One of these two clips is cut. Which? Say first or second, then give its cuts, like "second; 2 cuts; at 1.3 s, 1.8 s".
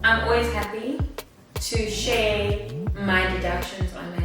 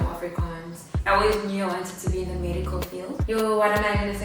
second; 2 cuts; at 0.9 s, 3.2 s